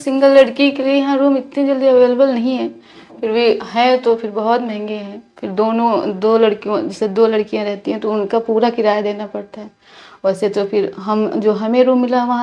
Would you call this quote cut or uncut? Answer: uncut